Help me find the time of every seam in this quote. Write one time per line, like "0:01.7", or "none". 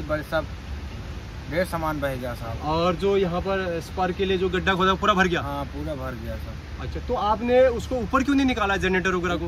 none